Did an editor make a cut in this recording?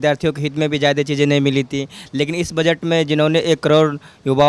no; 0 cuts

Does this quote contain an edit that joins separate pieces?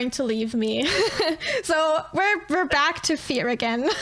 no; 0 cuts

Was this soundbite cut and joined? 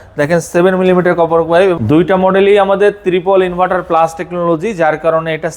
yes; 1 cut; at 1.8 s

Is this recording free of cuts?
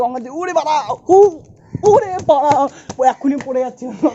yes; 0 cuts

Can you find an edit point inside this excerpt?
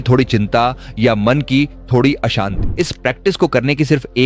yes; 1 cut; at 2.6 s

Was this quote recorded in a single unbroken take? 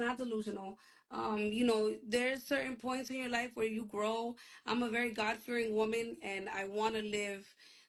yes; 0 cuts

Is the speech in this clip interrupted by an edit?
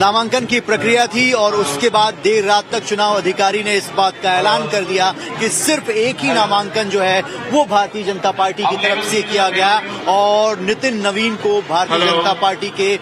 no; 0 cuts

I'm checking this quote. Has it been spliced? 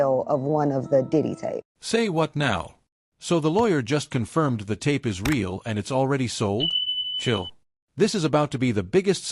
yes; 1 cut; at 1.7 s

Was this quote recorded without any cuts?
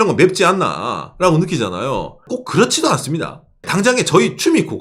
no; 2 cuts; at 2.3 s, 3.7 s

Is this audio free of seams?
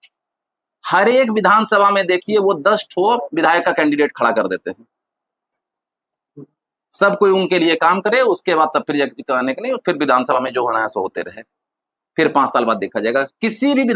yes; 0 cuts

